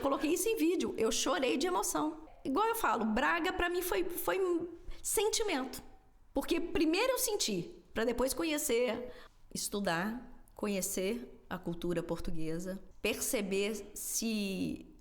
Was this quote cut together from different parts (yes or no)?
yes